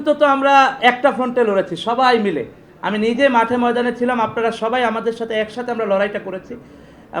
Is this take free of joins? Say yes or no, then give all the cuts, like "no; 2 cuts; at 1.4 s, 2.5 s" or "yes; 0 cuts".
yes; 0 cuts